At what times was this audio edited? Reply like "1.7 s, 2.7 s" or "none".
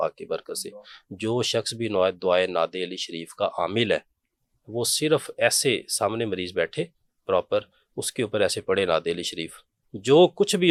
none

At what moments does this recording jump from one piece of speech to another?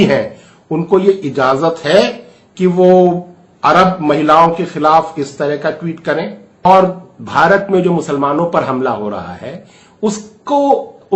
6.6 s

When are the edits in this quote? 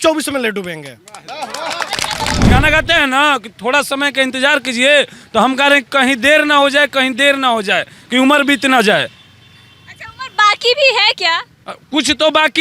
2.4 s

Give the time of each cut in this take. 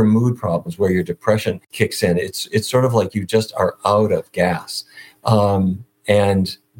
1.7 s

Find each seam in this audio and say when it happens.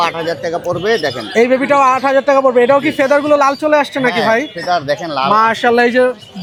none

